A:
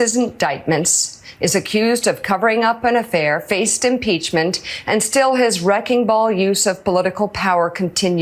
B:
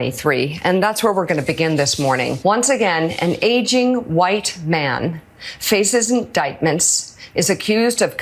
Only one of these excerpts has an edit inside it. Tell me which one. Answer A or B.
B